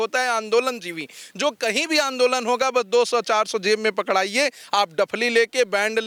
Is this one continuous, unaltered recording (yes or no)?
yes